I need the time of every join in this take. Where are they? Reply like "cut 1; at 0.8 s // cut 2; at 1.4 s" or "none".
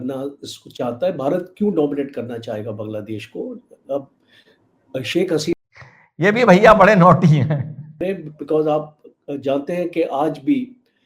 cut 1; at 5.5 s // cut 2; at 8.0 s